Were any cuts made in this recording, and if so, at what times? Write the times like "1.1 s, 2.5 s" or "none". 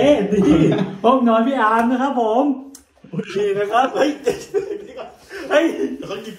none